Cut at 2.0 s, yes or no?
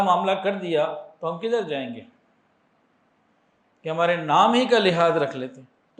no